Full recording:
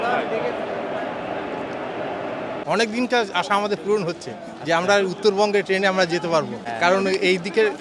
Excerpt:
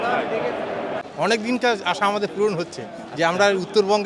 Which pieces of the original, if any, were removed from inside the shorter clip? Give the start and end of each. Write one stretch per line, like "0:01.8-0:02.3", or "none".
0:01.1-0:02.6